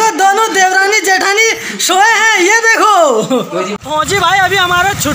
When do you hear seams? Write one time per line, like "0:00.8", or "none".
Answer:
0:03.8